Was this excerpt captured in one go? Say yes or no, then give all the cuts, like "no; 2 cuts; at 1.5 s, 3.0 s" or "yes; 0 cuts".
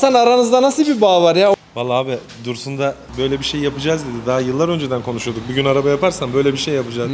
no; 2 cuts; at 1.6 s, 3.1 s